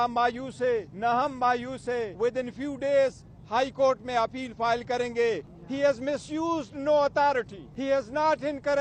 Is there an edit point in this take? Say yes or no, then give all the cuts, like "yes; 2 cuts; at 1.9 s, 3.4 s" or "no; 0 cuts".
yes; 4 cuts; at 0.9 s, 2.1 s, 5.5 s, 7.6 s